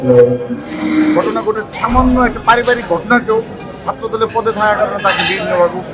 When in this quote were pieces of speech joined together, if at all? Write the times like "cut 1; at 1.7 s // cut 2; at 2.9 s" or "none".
cut 1; at 1.7 s

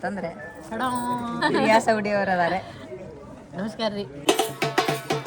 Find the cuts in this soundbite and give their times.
cut 1; at 1.4 s // cut 2; at 4.2 s

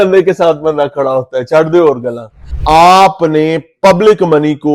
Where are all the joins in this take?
cut 1; at 2.5 s

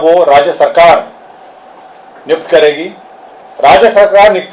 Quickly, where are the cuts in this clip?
none

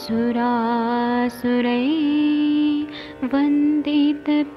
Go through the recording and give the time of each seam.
cut 1; at 3.6 s

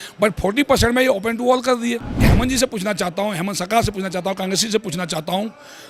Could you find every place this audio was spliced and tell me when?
cut 1; at 2.2 s

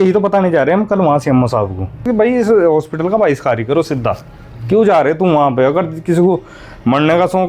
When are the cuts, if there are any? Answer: cut 1; at 2.1 s

